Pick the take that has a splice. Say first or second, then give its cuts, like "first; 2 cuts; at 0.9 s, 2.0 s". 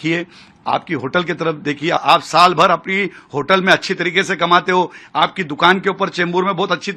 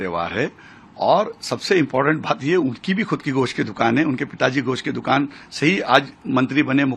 first; 1 cut; at 2.0 s